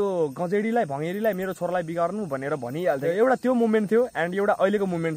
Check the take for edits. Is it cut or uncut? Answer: cut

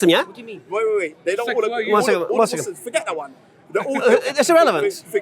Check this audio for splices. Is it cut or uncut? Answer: uncut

